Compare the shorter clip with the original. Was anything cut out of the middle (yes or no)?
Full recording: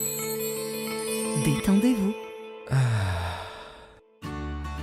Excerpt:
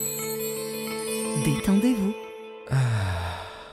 no